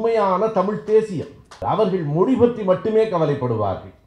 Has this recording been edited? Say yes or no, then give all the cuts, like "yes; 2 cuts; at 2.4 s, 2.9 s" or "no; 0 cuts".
yes; 1 cut; at 1.6 s